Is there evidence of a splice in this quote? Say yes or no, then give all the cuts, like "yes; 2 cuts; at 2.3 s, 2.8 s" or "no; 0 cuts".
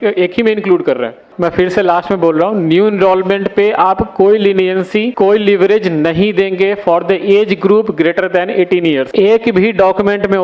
yes; 3 cuts; at 1.3 s, 5.1 s, 9.1 s